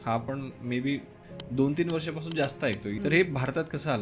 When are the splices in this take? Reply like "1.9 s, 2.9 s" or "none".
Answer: 1.2 s, 2.9 s